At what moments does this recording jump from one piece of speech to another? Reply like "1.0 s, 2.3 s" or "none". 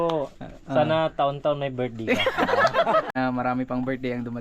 3.1 s